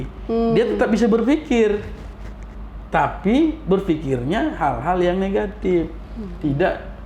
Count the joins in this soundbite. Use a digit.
0